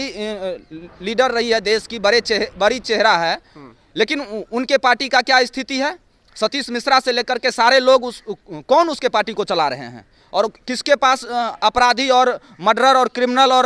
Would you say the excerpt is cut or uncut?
uncut